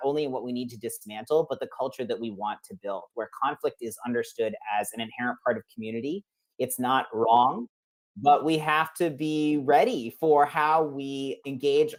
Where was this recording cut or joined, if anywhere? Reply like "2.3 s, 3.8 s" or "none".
none